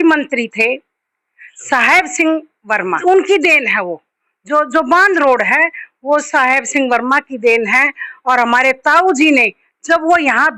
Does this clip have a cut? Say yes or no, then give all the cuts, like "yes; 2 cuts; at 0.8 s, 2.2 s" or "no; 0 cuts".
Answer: yes; 1 cut; at 3.0 s